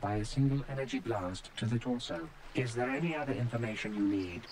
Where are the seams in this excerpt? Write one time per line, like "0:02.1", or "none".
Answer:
0:02.4